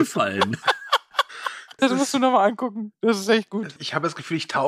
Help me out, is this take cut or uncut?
cut